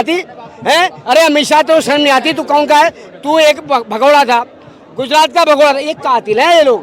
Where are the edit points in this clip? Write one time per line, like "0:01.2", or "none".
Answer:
none